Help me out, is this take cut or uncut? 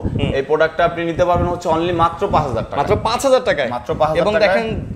uncut